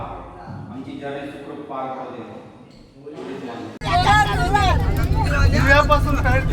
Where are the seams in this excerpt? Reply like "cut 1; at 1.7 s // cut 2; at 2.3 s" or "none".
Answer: cut 1; at 3.8 s

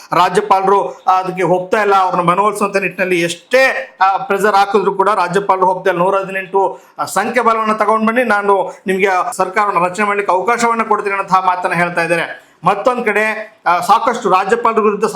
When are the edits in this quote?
none

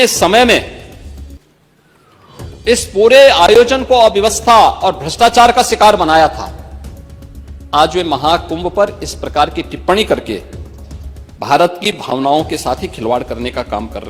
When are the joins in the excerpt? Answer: none

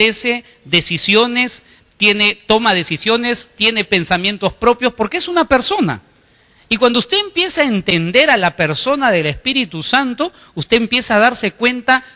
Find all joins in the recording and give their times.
cut 1; at 2.4 s

